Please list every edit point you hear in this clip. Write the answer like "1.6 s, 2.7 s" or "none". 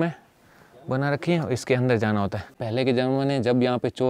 2.6 s